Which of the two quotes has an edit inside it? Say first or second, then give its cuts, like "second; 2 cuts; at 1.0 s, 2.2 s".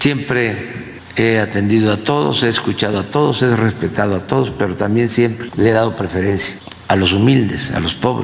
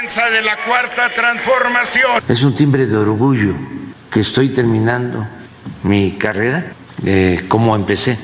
second; 1 cut; at 2.2 s